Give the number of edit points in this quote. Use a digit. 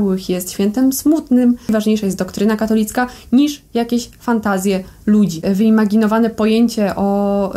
2